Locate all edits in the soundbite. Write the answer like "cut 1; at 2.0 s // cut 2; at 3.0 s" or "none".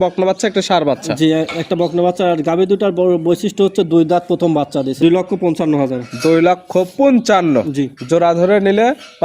cut 1; at 4.9 s